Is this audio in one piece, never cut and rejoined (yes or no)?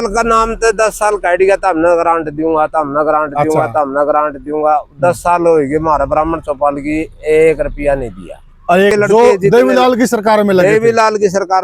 no